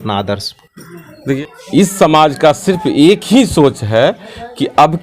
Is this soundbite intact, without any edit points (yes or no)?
no